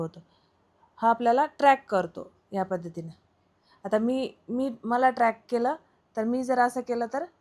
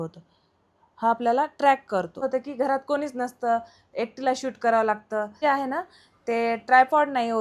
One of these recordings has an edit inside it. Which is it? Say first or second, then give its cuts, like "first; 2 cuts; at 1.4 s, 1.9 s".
second; 2 cuts; at 2.1 s, 5.3 s